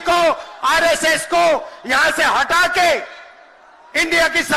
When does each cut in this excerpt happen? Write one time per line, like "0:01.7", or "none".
none